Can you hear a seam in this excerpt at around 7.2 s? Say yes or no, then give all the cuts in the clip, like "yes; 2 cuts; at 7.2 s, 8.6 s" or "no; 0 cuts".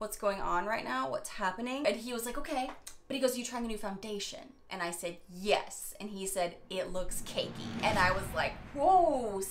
no; 2 cuts; at 1.8 s, 2.9 s